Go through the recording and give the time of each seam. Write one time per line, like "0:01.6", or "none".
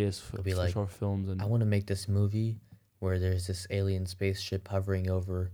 0:01.4